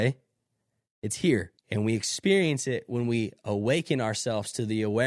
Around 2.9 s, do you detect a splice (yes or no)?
no